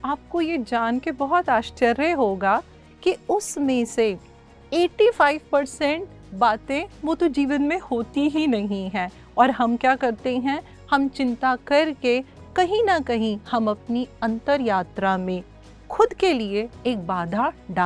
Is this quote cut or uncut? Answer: uncut